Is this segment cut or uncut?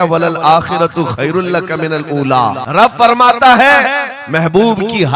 cut